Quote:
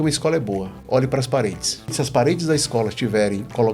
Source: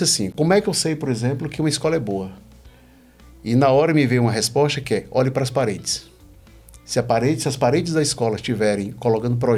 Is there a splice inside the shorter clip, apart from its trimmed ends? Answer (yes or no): yes